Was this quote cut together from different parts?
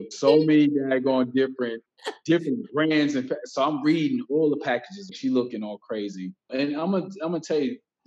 yes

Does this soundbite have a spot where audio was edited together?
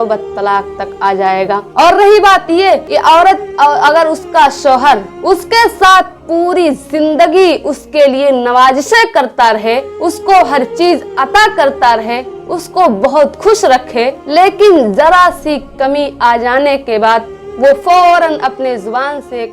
yes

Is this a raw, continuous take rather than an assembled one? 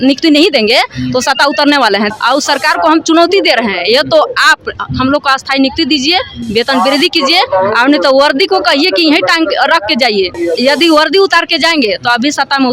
no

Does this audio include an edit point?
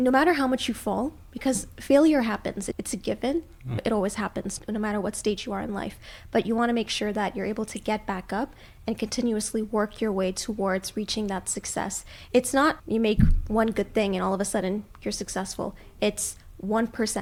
no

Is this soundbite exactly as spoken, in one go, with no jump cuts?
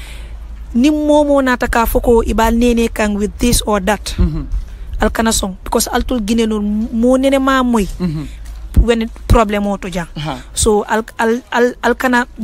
yes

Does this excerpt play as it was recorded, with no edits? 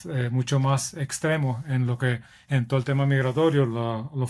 yes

